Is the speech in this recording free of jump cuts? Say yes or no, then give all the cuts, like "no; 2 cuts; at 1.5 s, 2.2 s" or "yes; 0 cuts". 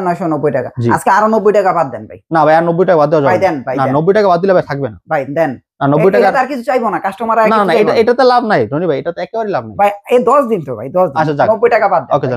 yes; 0 cuts